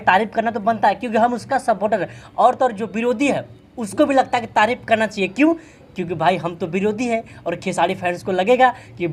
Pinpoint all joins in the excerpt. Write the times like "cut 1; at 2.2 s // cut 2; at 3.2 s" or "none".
none

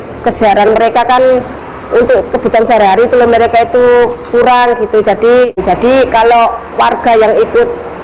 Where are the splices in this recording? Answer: cut 1; at 5.6 s

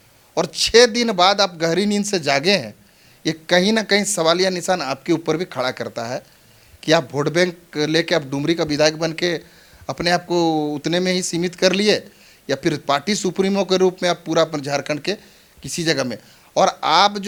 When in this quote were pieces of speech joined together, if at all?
none

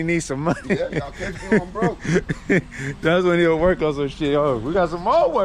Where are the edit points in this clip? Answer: none

